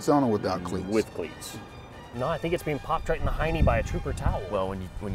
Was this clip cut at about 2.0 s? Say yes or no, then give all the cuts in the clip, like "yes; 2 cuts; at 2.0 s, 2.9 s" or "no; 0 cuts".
yes; 1 cut; at 2.0 s